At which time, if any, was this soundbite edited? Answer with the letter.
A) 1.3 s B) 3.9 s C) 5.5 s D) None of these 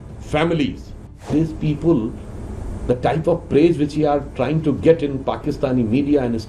A